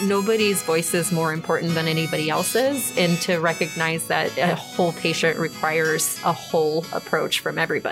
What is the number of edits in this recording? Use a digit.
2